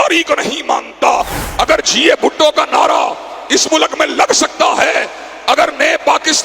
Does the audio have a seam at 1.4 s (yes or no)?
yes